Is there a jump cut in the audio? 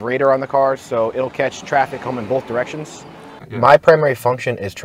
yes; 1 cut; at 3.5 s

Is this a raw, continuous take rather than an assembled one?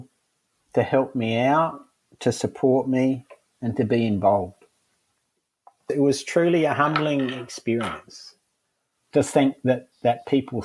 no; 1 cut; at 5.9 s

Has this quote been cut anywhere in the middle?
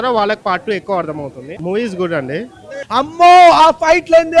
yes; 2 cuts; at 1.5 s, 2.8 s

